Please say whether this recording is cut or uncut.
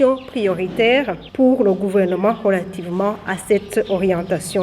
cut